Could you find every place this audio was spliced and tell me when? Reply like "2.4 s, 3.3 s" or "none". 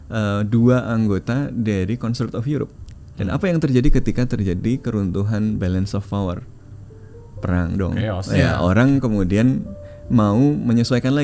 none